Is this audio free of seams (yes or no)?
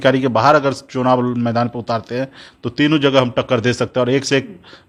yes